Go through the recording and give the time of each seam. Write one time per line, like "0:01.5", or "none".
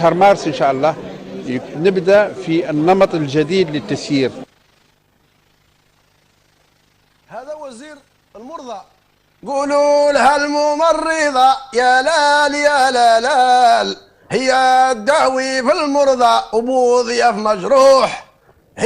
0:01.0